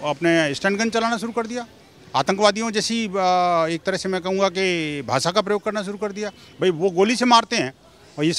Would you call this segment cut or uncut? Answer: uncut